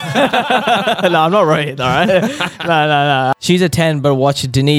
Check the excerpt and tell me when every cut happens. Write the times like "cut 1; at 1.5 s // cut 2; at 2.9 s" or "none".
cut 1; at 3.3 s